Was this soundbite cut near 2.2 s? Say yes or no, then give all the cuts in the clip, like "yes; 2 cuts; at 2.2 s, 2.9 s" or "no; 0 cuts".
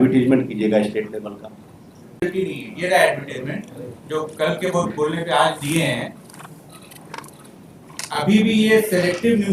yes; 1 cut; at 2.2 s